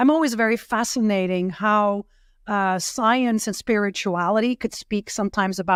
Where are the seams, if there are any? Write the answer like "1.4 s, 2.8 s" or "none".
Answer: none

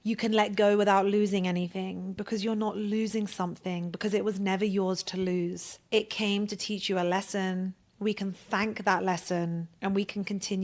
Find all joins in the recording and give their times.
5.7 s, 9.7 s

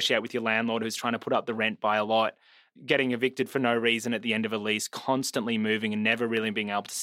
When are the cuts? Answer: 2.6 s

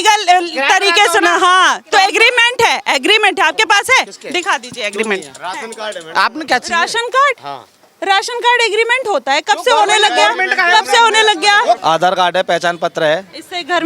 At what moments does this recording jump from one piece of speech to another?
11.8 s

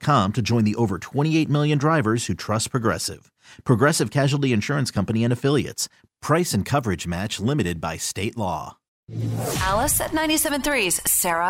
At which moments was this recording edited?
9.0 s

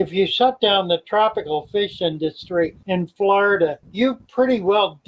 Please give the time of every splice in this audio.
2.8 s, 3.8 s

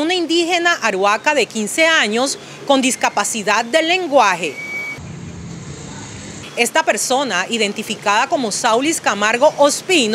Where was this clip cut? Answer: none

